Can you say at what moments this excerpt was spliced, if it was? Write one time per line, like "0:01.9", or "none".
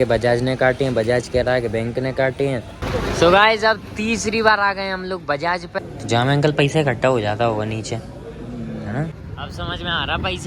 0:02.7
0:05.8
0:09.2